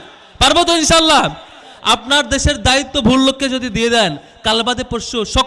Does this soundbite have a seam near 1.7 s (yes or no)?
yes